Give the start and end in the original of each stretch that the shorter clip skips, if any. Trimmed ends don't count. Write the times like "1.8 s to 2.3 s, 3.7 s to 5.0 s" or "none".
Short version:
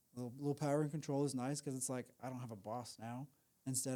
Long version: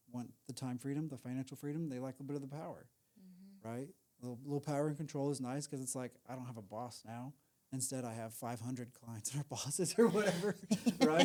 none